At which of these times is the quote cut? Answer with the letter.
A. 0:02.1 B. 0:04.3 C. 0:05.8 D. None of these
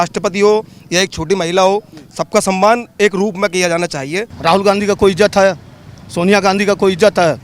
B